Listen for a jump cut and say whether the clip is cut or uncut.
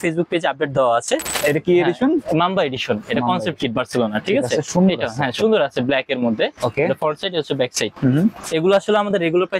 cut